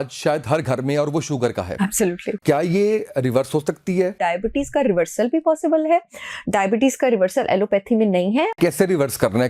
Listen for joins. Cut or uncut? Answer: cut